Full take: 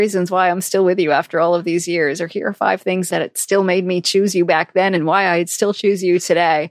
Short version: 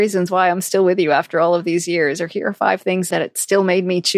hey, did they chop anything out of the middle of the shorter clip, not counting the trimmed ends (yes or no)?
no